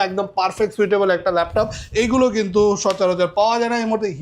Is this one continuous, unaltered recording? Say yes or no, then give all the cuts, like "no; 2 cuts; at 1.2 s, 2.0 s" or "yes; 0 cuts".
yes; 0 cuts